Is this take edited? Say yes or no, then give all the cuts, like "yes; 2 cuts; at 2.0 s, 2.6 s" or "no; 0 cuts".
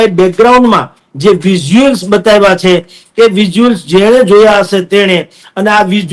no; 0 cuts